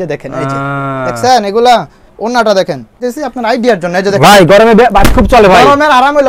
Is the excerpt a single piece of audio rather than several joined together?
no; 1 cut; at 3.1 s

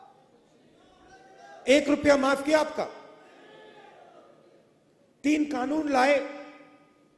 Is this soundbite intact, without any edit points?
yes; 0 cuts

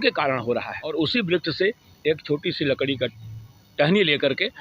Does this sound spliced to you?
yes; 1 cut; at 0.9 s

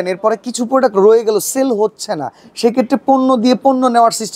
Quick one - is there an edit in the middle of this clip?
no; 0 cuts

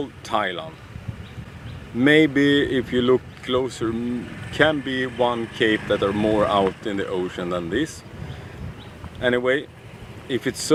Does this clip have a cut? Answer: no; 0 cuts

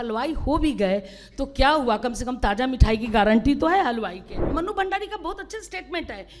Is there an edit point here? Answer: yes; 1 cut; at 4.4 s

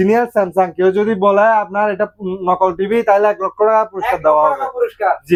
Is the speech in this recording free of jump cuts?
yes; 0 cuts

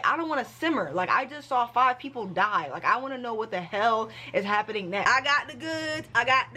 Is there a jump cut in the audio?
yes; 1 cut; at 5.0 s

